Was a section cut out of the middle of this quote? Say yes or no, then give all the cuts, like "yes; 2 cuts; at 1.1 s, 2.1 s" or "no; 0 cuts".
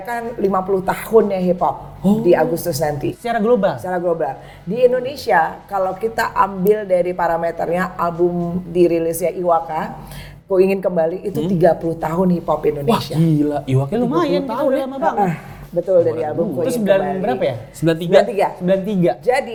no; 0 cuts